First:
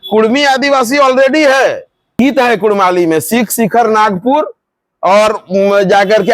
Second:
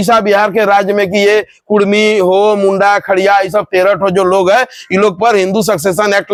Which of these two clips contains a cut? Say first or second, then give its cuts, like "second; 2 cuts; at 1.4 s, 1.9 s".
first; 1 cut; at 2.2 s